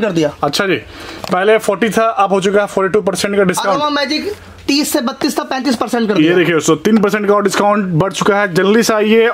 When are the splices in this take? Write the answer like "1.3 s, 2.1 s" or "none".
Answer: none